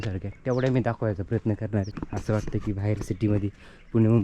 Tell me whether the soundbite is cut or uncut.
cut